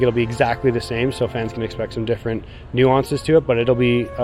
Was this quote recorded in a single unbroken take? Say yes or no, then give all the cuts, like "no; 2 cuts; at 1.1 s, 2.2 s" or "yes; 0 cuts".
yes; 0 cuts